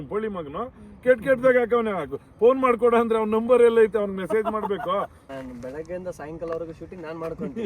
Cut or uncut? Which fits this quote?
cut